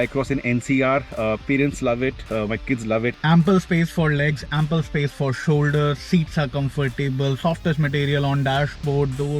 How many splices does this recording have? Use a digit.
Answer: 1